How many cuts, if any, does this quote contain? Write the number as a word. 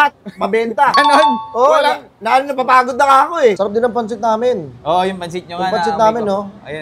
one